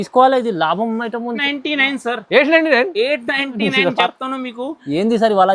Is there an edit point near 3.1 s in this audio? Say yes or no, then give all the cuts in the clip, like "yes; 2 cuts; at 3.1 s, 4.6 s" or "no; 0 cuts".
no; 1 cut; at 1.4 s